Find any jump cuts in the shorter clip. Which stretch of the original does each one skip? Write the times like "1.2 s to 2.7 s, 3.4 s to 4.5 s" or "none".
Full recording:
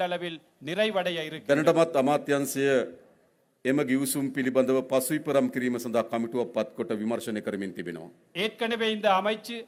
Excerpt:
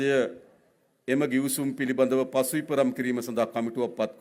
none